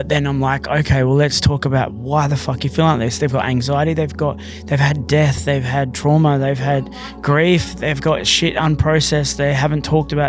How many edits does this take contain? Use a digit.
0